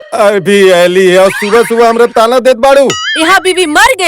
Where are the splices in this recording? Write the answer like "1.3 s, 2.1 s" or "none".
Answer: 3.0 s